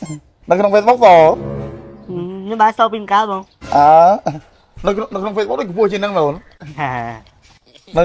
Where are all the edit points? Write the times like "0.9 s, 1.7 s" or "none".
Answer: none